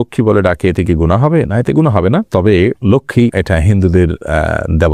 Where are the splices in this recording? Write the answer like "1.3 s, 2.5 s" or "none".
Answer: none